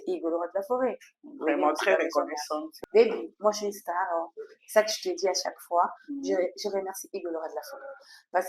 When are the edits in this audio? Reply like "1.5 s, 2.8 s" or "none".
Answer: 2.6 s

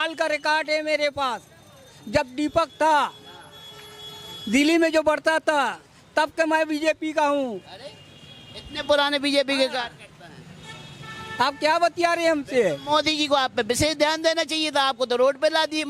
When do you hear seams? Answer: none

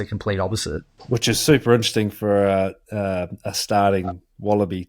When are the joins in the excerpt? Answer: 0.9 s

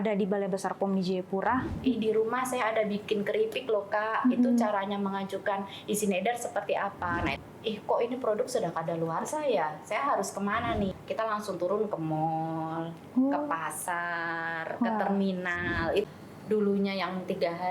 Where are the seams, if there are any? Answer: 1.7 s, 7.4 s, 11.0 s, 16.0 s

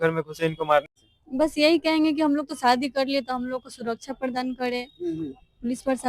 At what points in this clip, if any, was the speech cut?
1.0 s

